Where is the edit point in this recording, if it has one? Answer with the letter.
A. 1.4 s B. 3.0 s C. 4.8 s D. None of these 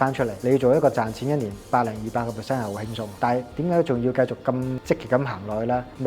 C